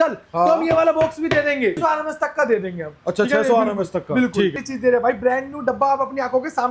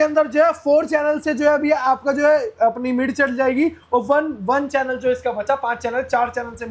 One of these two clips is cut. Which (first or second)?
first